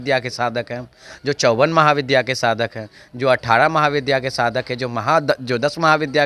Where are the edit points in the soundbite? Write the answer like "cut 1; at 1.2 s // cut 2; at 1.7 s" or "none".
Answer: none